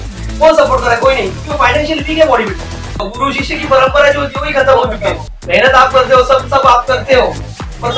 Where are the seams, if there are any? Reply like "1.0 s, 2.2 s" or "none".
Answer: 3.1 s, 5.3 s